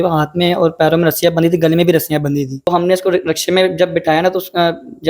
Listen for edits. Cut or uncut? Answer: cut